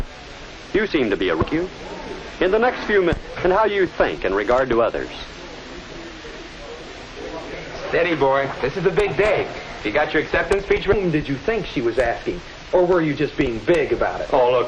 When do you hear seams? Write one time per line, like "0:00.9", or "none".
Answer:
none